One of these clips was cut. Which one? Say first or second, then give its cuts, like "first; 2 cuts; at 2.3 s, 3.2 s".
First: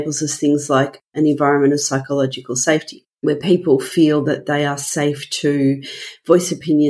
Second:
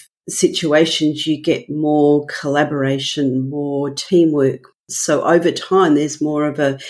second; 1 cut; at 4.8 s